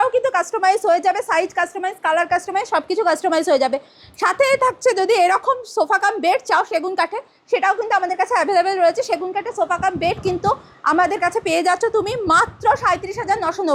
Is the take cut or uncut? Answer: uncut